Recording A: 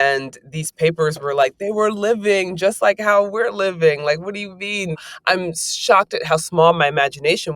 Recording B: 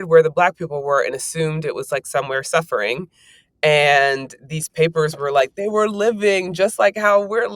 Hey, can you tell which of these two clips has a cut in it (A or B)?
A